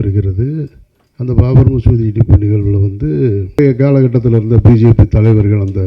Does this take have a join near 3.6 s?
yes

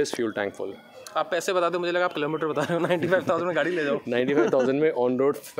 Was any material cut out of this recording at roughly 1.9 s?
no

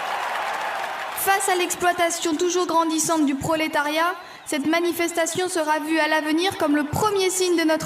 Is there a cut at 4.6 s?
no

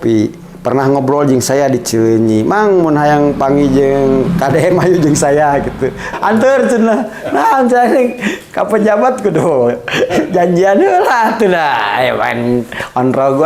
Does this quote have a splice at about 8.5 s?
no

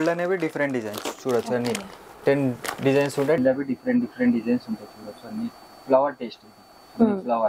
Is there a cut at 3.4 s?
yes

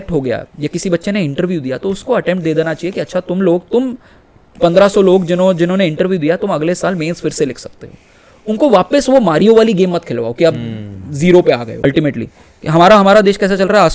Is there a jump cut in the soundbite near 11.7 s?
yes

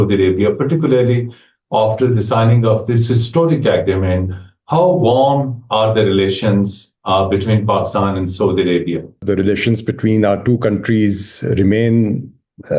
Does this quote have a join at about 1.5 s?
no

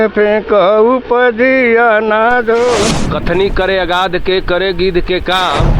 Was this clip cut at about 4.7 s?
no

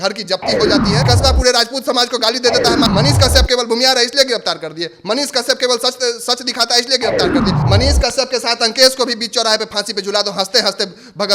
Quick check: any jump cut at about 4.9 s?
no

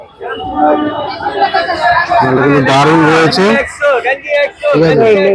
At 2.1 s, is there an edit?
no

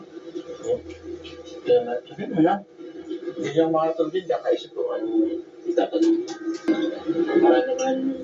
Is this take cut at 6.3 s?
yes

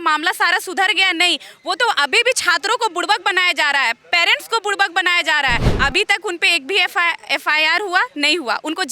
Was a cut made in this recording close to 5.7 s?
yes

